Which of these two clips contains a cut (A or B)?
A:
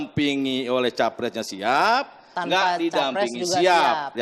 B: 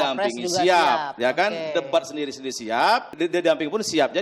B